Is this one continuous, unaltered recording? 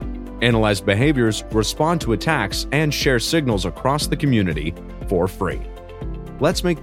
yes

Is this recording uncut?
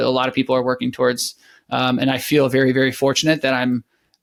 yes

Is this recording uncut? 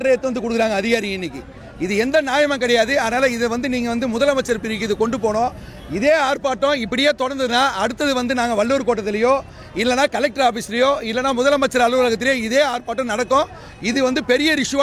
yes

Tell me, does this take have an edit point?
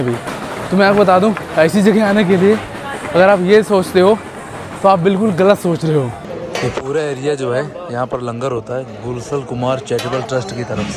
no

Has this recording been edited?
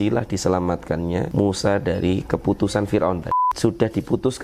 yes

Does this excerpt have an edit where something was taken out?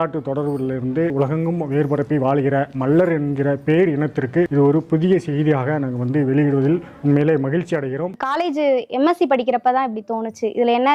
yes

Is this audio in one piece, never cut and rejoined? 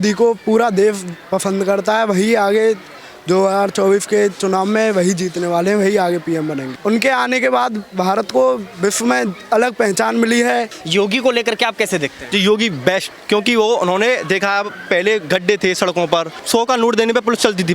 no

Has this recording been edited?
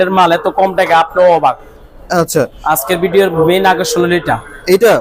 no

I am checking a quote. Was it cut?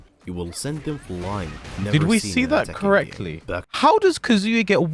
yes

